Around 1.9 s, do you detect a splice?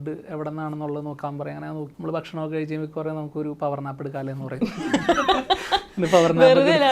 yes; 1 cut; at 1.9 s

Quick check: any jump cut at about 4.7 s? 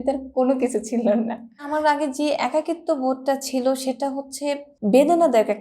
yes; 2 cuts; at 1.7 s, 4.7 s

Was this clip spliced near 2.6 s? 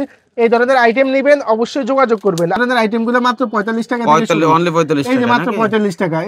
yes; 1 cut; at 2.6 s

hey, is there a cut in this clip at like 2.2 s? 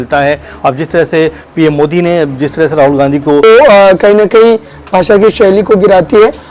no; 1 cut; at 3.4 s

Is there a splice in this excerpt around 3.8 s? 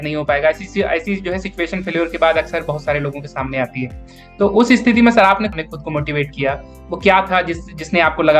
no; 1 cut; at 5.5 s

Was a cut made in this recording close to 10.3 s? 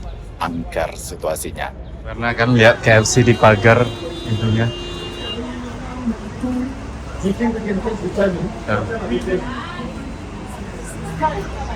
no; 1 cut; at 2.3 s

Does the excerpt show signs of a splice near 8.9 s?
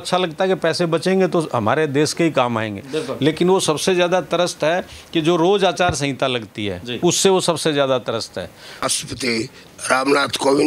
yes; 1 cut; at 8.9 s

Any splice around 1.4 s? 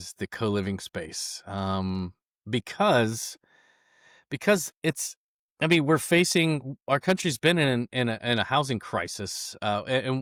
no; 0 cuts

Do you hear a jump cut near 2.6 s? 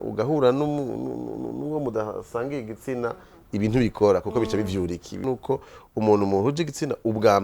no; 1 cut; at 5.2 s

